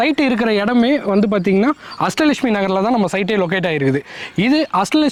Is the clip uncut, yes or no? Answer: yes